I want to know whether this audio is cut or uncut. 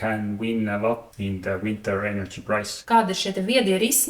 cut